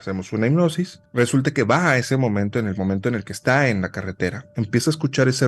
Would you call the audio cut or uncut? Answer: cut